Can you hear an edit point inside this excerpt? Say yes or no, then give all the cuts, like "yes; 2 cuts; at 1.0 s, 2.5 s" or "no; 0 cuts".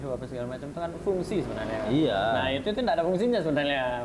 no; 0 cuts